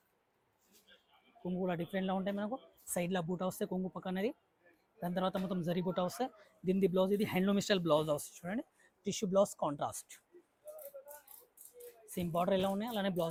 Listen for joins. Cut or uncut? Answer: uncut